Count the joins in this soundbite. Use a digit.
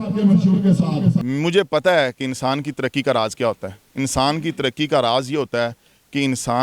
1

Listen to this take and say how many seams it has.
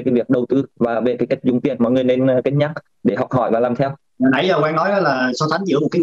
1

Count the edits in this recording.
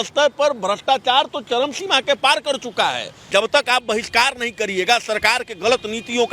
1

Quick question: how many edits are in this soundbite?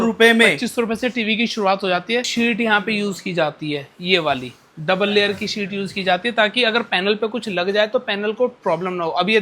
1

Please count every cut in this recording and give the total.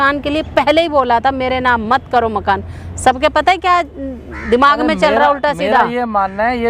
0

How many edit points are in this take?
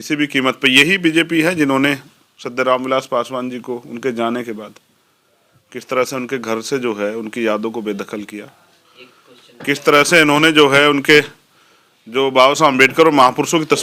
0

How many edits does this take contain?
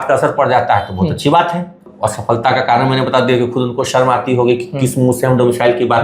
1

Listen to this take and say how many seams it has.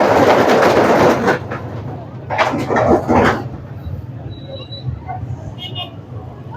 0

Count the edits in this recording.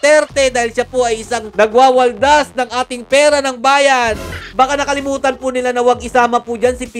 1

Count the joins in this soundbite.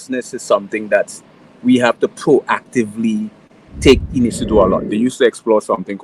1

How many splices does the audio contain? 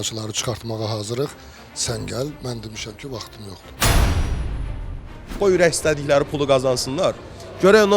2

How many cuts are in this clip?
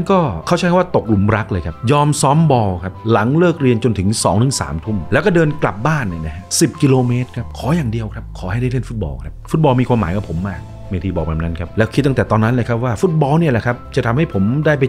2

